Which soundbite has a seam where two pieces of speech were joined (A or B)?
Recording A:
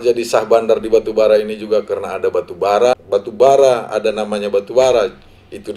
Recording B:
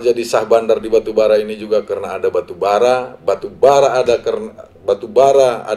A